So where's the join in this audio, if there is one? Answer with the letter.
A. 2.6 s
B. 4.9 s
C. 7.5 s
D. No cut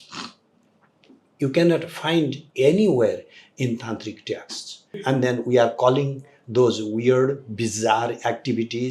B